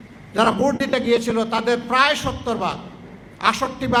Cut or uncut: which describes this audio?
uncut